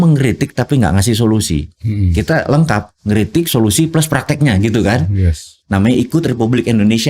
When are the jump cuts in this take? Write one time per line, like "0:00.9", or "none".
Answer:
0:05.5